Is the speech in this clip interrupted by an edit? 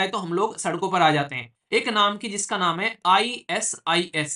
yes; 1 cut; at 1.5 s

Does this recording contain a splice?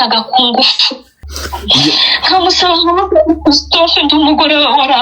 yes; 1 cut; at 1.3 s

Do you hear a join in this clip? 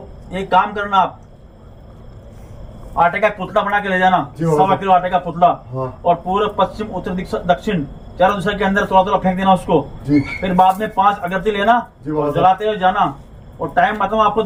no; 0 cuts

